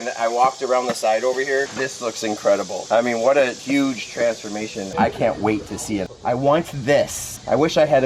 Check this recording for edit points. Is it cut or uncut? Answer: cut